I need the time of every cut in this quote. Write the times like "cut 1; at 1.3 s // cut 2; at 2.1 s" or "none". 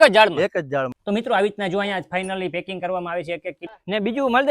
cut 1; at 1.0 s // cut 2; at 3.6 s